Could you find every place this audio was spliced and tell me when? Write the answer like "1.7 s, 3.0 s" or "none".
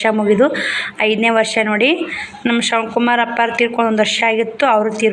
none